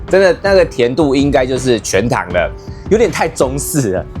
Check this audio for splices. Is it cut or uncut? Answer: cut